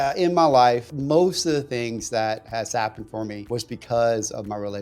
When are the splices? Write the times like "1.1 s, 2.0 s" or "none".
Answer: 0.9 s, 3.4 s